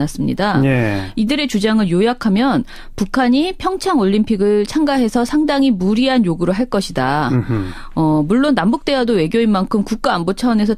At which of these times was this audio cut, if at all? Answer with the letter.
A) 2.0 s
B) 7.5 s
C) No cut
B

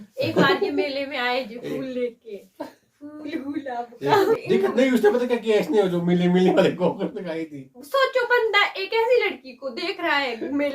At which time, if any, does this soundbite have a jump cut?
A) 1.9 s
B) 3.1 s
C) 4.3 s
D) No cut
C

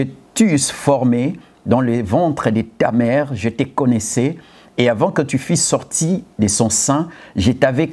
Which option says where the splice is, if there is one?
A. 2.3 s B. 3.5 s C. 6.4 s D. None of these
D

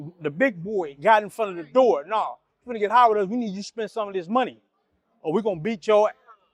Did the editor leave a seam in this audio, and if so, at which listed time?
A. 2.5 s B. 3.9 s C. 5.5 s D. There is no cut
D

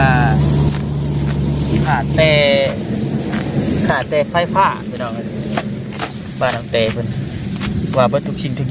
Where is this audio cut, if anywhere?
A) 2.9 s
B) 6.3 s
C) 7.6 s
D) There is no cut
D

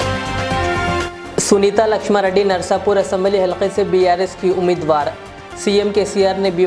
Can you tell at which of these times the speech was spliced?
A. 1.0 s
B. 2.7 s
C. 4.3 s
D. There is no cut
A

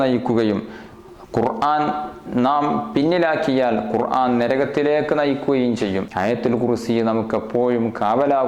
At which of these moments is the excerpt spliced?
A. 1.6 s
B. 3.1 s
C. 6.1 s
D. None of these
C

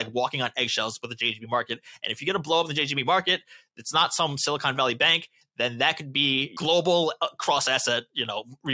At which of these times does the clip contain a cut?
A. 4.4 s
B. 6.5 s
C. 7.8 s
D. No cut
B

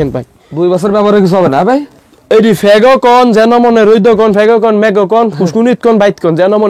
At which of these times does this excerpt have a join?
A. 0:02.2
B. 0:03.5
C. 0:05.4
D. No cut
D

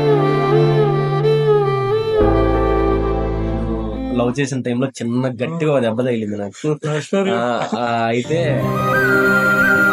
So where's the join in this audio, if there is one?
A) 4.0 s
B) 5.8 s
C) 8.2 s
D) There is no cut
A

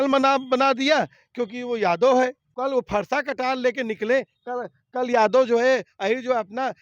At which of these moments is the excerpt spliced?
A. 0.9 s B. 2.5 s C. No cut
B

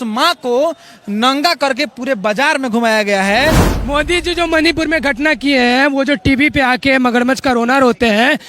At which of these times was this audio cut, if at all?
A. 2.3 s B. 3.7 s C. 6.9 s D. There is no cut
B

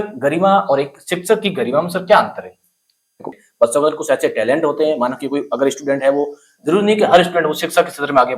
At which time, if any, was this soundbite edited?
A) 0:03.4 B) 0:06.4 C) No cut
A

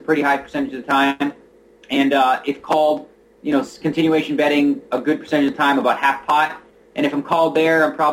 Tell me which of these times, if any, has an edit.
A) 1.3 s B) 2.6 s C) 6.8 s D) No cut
D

